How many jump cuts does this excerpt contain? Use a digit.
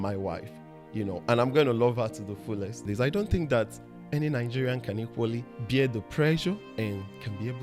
3